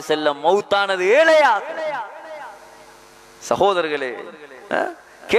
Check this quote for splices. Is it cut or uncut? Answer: uncut